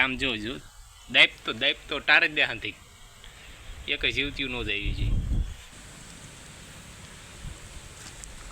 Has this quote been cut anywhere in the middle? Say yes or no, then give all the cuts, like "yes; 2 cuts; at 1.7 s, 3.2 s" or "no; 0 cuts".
yes; 1 cut; at 5.7 s